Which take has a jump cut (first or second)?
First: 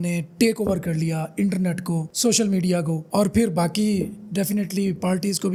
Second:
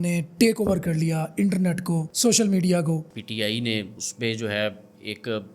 second